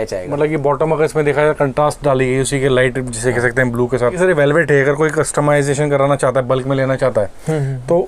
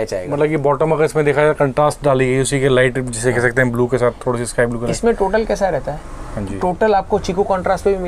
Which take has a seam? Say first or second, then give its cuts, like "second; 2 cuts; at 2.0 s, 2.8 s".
first; 1 cut; at 4.2 s